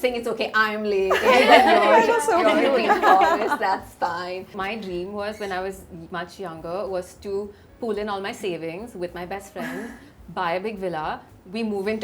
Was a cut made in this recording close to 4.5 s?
no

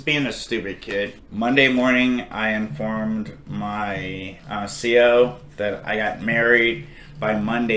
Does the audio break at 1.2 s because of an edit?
yes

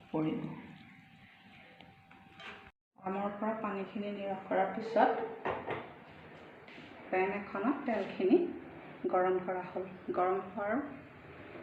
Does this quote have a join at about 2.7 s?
no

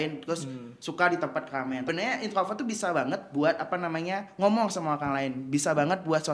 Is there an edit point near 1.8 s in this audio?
yes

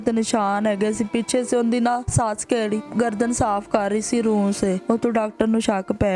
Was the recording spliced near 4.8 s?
yes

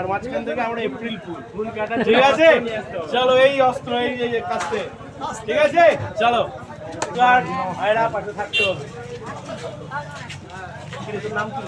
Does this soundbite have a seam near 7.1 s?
yes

